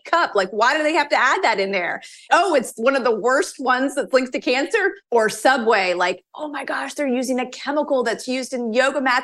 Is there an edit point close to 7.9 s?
no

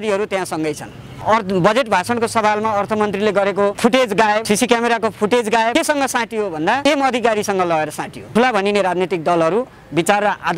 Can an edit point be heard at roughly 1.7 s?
no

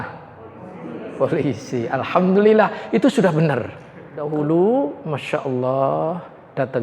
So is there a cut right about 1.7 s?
no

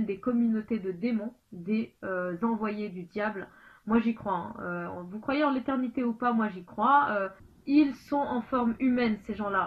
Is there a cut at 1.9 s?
no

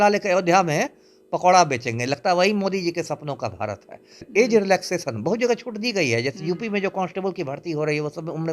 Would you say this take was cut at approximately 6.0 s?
no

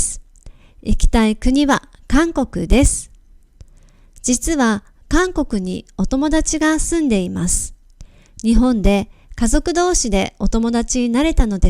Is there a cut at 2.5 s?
no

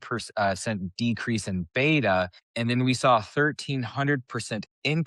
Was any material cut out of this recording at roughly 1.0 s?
no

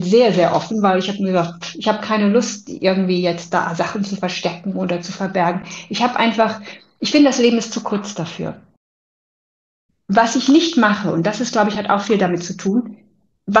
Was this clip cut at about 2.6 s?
no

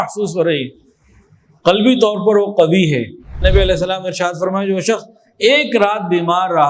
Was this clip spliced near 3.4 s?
yes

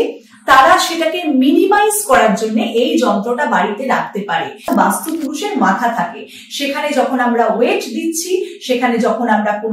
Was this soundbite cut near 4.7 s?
yes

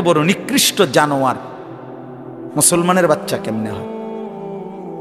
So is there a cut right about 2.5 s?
no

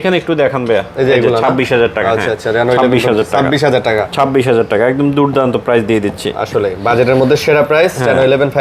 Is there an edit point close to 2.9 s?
no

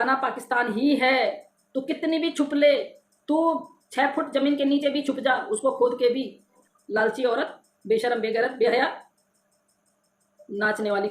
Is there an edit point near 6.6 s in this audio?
yes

